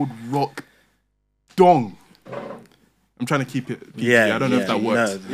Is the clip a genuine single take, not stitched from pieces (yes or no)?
yes